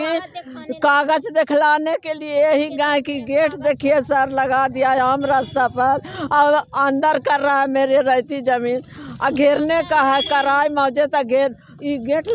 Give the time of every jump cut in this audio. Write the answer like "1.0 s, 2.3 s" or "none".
none